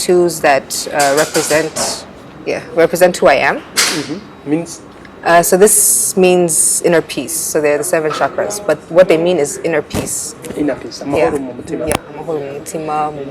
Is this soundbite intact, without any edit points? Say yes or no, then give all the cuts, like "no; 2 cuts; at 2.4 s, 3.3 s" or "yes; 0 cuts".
yes; 0 cuts